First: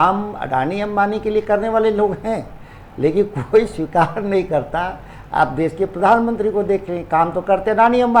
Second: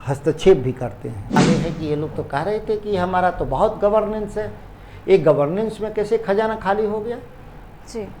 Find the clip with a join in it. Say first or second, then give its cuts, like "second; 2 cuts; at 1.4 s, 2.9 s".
second; 1 cut; at 1.4 s